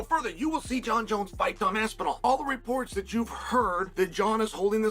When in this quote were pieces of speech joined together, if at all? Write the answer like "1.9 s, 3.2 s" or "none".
2.2 s, 3.9 s